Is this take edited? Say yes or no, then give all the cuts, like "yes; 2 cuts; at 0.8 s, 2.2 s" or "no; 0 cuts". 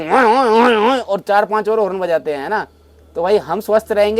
no; 0 cuts